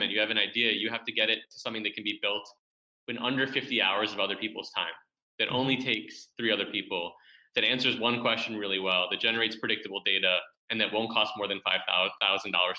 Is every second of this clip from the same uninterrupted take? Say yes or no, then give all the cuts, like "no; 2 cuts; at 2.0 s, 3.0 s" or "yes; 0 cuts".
yes; 0 cuts